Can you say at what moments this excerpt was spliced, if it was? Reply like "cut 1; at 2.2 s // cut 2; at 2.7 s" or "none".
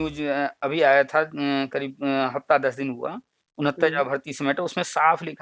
none